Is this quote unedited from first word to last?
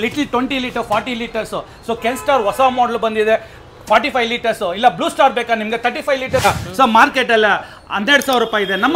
no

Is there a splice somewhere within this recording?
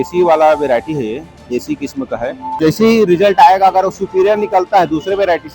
yes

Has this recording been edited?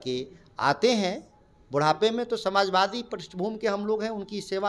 no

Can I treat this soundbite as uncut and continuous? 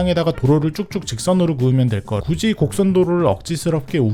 yes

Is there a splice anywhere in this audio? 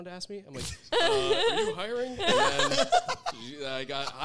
no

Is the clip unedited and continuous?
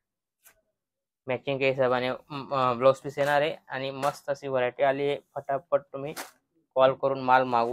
yes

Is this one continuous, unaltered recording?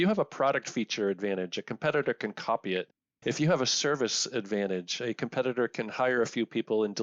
yes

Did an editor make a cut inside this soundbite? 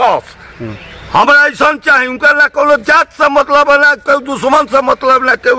no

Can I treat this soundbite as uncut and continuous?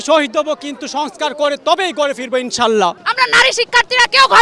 no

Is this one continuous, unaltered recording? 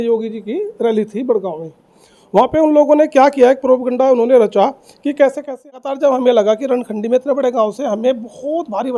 no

